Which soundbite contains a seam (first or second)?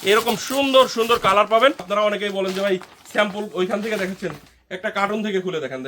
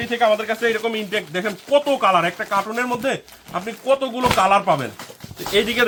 first